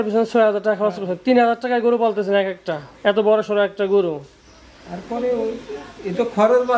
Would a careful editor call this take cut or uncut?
uncut